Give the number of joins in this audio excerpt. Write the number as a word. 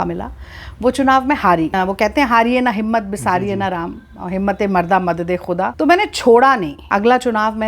three